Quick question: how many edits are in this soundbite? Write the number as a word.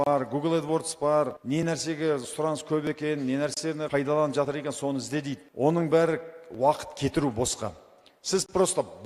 three